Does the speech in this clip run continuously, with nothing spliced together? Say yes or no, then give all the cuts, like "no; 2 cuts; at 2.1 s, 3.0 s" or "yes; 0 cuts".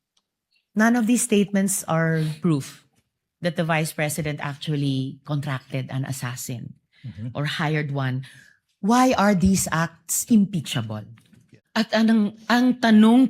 no; 1 cut; at 11.6 s